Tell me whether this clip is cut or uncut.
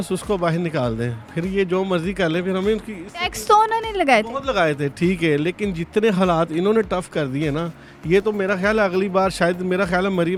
uncut